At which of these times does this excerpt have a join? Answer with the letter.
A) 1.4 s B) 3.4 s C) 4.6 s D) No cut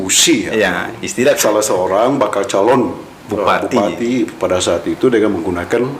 A